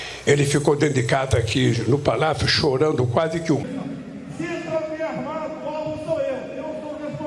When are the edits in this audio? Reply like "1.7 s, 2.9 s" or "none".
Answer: 3.6 s